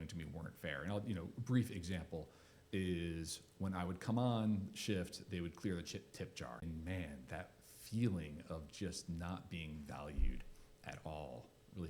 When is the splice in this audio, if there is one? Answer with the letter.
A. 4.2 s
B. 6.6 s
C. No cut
B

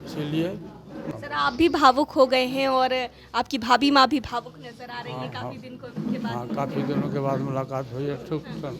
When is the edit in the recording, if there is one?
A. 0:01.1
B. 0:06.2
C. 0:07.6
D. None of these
A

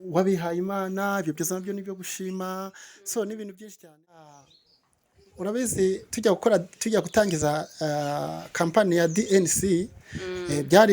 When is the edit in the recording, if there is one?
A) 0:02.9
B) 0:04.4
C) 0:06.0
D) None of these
B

